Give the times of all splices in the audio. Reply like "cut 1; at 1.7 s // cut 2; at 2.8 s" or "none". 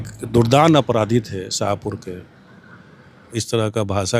none